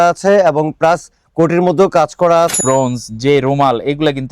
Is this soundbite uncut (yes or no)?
no